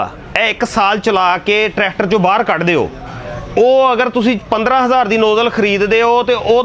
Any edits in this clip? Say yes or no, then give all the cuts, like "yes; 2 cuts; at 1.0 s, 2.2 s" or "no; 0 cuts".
no; 0 cuts